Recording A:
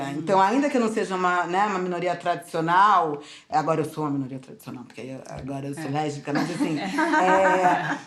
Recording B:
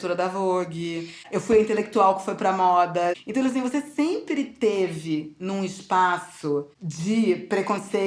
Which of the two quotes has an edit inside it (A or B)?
B